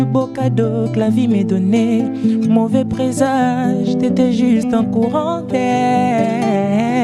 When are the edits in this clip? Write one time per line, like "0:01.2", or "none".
none